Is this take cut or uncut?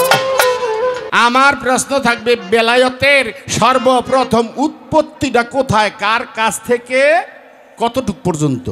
cut